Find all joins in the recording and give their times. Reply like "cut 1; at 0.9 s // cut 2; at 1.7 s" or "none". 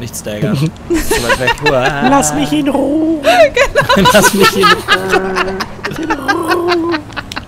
cut 1; at 6.0 s